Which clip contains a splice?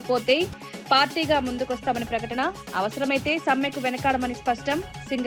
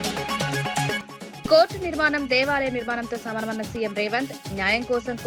second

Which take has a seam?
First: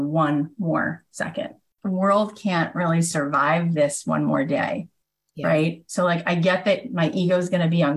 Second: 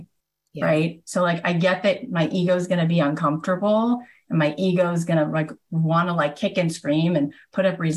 first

